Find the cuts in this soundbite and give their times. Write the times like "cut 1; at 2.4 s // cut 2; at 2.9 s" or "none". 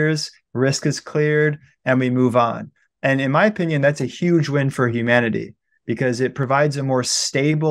none